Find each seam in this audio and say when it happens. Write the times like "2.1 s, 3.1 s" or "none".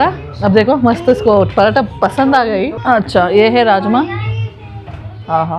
2.8 s